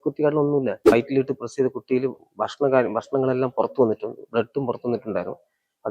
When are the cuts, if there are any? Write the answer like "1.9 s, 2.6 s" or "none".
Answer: 0.9 s